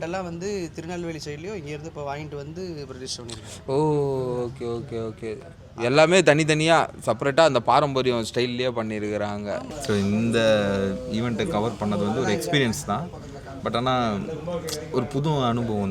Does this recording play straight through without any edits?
no; 1 cut; at 9.7 s

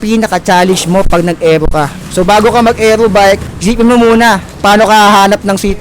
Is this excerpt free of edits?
no; 3 cuts; at 2.0 s, 3.5 s, 4.5 s

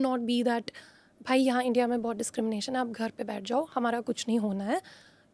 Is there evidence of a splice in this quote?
no; 0 cuts

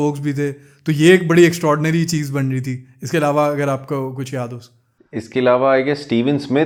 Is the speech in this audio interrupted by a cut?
no; 0 cuts

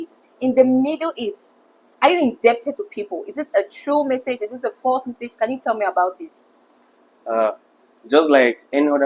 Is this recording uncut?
yes; 0 cuts

